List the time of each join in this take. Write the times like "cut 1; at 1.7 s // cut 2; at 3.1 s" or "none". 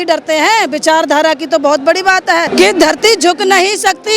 cut 1; at 2.5 s